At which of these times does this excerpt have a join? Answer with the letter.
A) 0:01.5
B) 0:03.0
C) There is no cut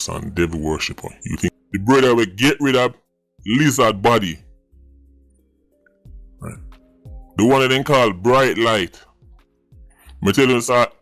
A